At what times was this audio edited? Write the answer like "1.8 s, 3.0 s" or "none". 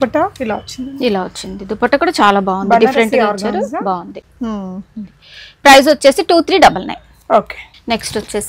none